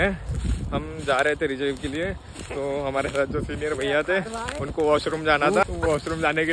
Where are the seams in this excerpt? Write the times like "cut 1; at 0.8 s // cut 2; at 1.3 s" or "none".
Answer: cut 1; at 5.6 s